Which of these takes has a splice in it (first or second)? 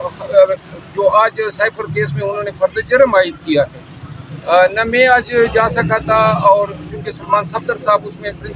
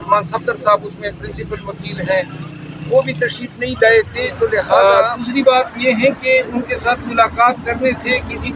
second